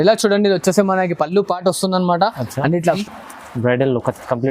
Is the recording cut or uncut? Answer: cut